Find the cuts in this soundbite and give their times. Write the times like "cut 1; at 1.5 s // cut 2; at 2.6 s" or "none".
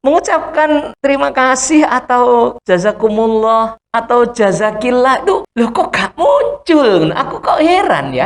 cut 1; at 0.9 s // cut 2; at 2.6 s // cut 3; at 3.8 s // cut 4; at 5.5 s